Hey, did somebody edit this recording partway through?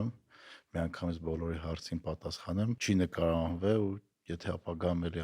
yes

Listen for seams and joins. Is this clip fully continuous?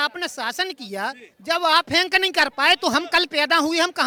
yes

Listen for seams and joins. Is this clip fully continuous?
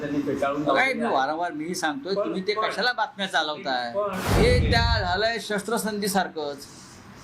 no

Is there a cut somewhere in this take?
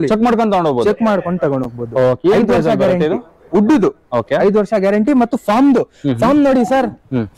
no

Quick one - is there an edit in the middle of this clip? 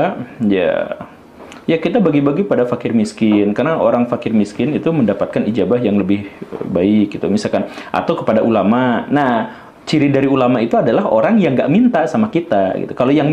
no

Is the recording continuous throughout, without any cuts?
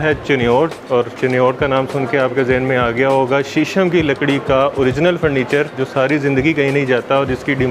no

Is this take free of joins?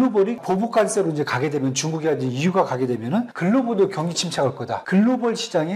no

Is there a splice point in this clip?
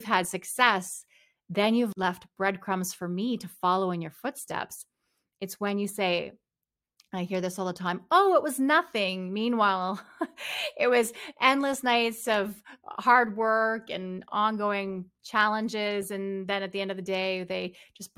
yes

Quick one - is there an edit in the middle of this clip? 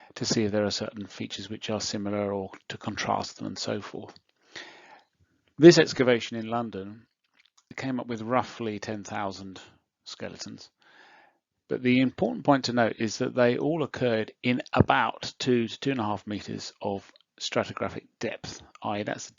yes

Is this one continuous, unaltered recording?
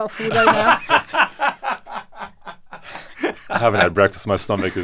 no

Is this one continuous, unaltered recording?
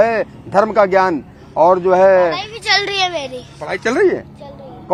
yes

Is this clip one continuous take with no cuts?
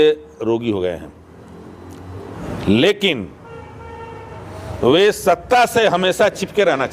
no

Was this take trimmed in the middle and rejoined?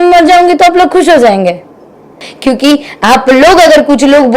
yes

